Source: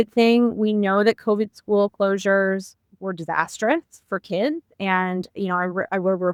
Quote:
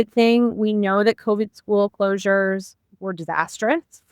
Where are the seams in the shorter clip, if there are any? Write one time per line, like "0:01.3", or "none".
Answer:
none